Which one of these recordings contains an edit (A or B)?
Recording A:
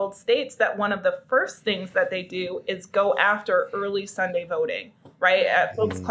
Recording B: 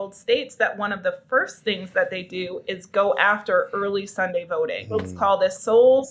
B